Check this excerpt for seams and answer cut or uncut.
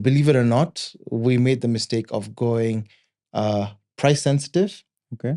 uncut